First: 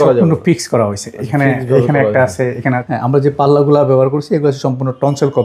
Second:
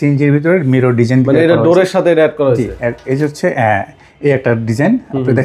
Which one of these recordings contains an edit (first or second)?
first